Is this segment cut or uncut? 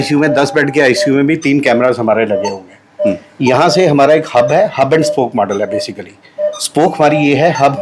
uncut